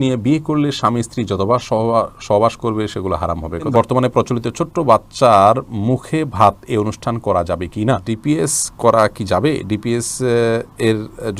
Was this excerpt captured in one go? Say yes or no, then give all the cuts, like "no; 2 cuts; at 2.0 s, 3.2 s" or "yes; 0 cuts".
no; 2 cuts; at 3.7 s, 8.1 s